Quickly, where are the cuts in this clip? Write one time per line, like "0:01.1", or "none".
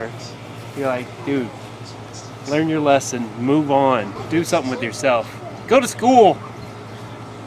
0:04.2